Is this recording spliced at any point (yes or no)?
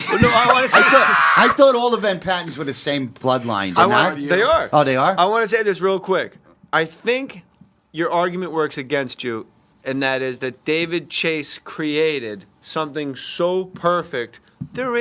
no